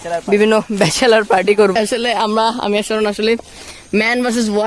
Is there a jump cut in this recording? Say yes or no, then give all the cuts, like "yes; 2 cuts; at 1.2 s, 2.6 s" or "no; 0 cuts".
yes; 1 cut; at 1.8 s